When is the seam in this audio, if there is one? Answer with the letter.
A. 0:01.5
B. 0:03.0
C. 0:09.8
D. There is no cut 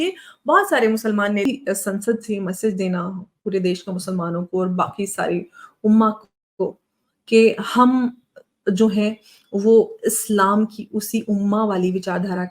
A